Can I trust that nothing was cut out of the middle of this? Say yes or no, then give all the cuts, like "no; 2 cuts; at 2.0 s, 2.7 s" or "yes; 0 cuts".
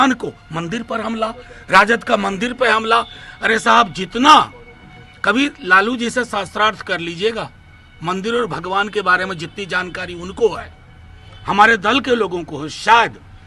yes; 0 cuts